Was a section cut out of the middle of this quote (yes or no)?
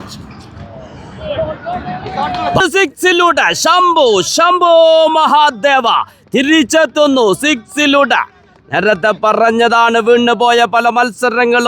yes